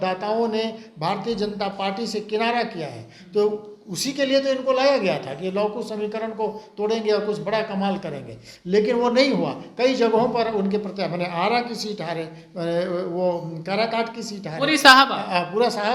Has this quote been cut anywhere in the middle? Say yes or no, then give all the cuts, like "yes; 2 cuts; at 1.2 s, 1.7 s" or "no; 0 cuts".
no; 0 cuts